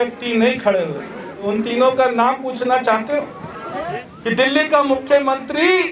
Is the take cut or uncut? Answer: cut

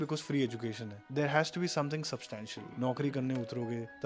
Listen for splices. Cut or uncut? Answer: cut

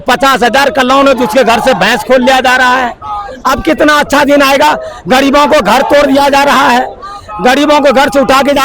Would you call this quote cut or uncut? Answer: uncut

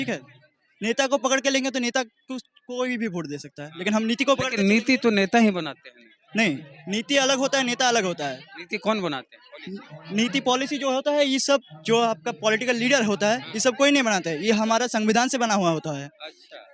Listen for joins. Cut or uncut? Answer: uncut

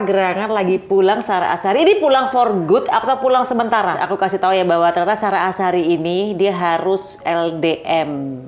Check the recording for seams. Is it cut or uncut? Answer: cut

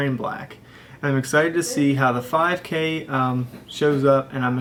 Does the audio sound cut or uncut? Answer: uncut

